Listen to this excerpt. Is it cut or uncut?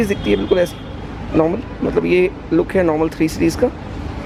uncut